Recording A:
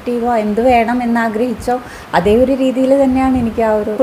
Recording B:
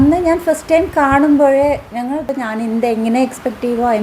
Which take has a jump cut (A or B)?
B